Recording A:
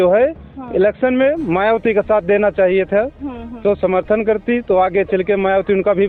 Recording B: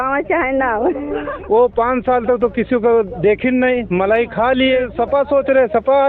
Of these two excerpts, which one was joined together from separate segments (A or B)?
B